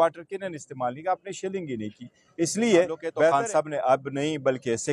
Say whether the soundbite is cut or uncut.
cut